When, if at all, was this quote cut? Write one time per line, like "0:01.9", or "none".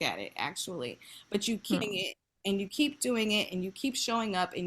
0:01.8